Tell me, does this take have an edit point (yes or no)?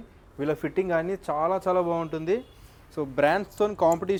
no